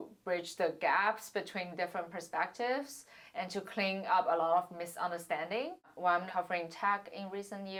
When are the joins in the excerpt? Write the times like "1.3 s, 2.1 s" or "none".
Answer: none